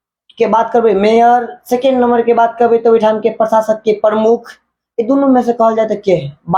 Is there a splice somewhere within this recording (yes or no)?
no